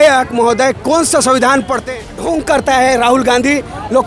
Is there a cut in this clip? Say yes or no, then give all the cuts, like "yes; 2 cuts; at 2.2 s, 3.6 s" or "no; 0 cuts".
yes; 1 cut; at 2.5 s